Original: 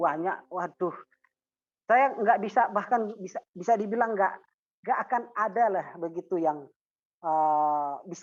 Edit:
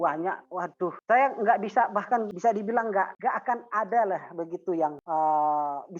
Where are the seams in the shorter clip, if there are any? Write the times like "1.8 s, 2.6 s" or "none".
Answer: 1.0 s, 2.3 s, 3.1 s, 5.0 s